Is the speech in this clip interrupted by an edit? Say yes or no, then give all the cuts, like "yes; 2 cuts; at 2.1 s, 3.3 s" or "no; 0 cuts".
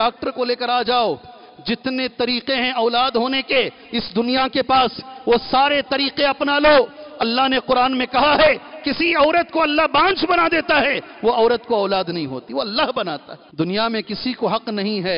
yes; 1 cut; at 13.4 s